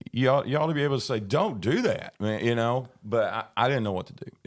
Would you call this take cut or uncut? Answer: uncut